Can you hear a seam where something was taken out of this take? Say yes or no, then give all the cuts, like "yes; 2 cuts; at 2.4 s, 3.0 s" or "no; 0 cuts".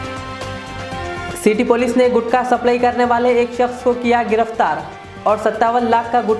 yes; 1 cut; at 1.2 s